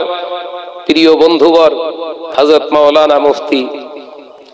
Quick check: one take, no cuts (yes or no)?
yes